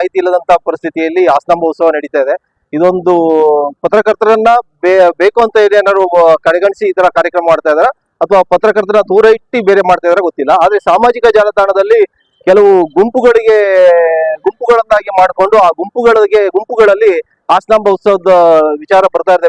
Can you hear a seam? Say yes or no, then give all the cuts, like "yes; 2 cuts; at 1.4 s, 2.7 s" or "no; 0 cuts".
no; 0 cuts